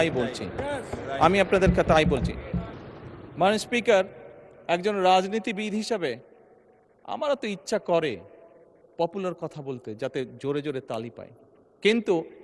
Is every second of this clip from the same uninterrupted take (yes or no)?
no